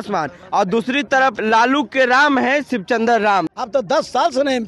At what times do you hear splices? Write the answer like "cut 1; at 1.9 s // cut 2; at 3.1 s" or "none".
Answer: cut 1; at 1.4 s // cut 2; at 3.5 s